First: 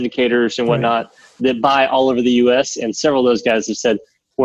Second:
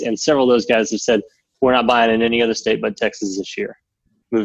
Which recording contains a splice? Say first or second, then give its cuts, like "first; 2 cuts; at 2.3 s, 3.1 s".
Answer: first; 1 cut; at 1.4 s